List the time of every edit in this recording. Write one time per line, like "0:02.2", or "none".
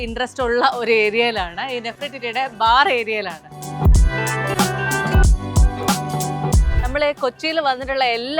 0:03.6
0:06.7